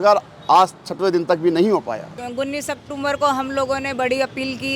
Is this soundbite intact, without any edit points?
no; 1 cut; at 2.2 s

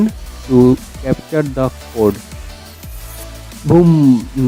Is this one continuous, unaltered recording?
yes; 0 cuts

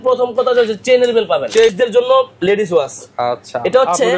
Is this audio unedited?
no; 1 cut; at 1.7 s

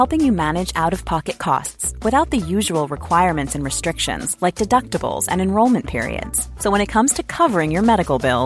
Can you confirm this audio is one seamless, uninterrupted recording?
yes; 0 cuts

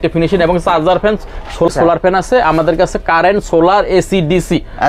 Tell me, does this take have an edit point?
yes; 1 cut; at 1.7 s

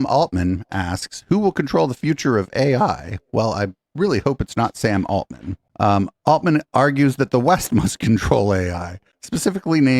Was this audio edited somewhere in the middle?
no; 0 cuts

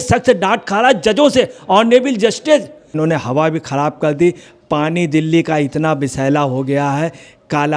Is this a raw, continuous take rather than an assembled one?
no; 1 cut; at 2.9 s

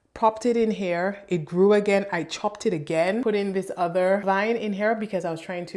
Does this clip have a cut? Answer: yes; 2 cuts; at 3.2 s, 4.2 s

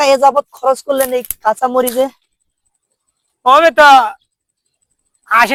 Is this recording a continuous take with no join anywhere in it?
yes; 0 cuts

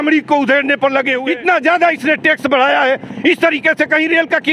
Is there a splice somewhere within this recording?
yes; 1 cut; at 1.2 s

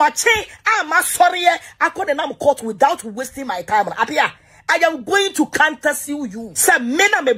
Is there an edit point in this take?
yes; 1 cut; at 6.5 s

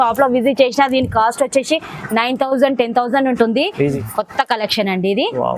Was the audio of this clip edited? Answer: yes; 1 cut; at 3.9 s

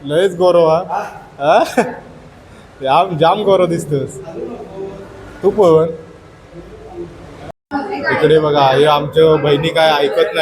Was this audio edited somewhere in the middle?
yes; 1 cut; at 7.5 s

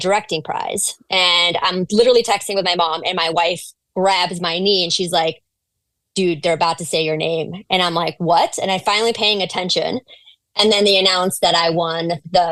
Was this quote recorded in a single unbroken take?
yes; 0 cuts

